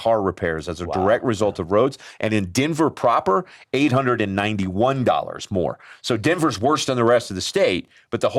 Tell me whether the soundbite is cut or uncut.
uncut